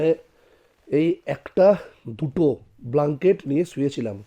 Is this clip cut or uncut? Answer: uncut